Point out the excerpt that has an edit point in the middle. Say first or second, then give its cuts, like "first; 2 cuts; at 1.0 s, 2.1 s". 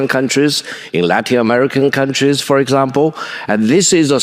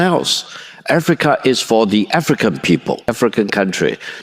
second; 1 cut; at 3.1 s